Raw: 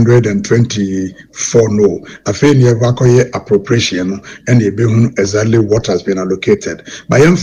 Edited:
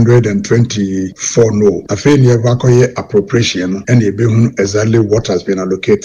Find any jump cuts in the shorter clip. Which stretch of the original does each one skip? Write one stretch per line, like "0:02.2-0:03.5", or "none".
0:01.2-0:01.3
0:02.1-0:02.2
0:04.2-0:04.4